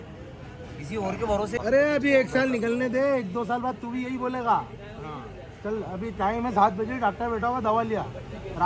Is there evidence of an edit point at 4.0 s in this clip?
no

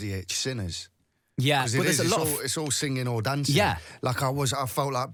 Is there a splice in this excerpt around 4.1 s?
no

